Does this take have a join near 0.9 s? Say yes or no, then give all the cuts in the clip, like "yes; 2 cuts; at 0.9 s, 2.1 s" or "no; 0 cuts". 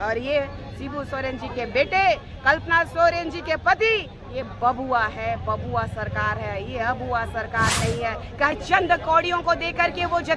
no; 1 cut; at 8.6 s